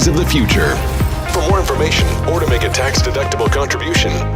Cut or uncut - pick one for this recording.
uncut